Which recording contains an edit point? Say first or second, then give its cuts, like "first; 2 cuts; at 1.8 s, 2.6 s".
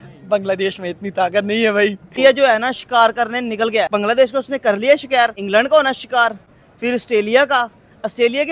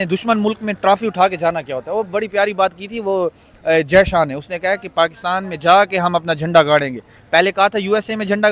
first; 3 cuts; at 2.0 s, 3.9 s, 5.4 s